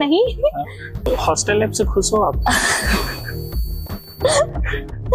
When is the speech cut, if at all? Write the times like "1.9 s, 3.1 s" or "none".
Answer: 1.1 s